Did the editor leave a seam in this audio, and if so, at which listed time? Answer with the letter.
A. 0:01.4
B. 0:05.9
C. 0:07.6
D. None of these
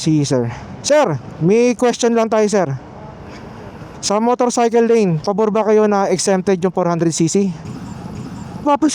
C